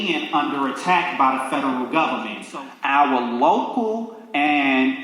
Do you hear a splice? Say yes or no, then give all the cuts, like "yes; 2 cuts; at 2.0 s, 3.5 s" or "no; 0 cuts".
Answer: yes; 1 cut; at 2.4 s